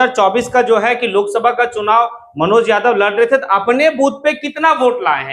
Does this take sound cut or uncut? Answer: uncut